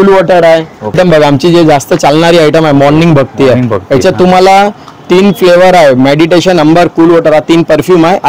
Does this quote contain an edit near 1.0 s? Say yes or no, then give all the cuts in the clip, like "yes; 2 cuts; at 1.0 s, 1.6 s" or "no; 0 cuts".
yes; 1 cut; at 1.0 s